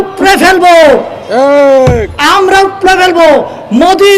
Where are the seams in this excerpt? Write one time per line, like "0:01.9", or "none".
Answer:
none